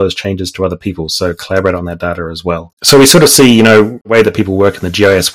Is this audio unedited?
no; 2 cuts; at 2.7 s, 4.1 s

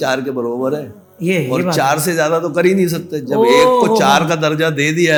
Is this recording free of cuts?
yes; 0 cuts

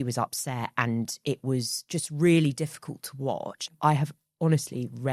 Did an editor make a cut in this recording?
yes; 1 cut; at 3.7 s

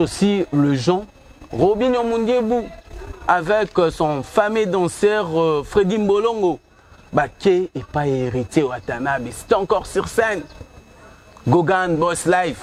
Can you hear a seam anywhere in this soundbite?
no; 0 cuts

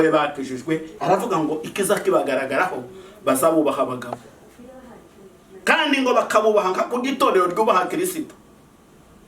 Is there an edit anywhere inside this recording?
yes; 1 cut; at 0.9 s

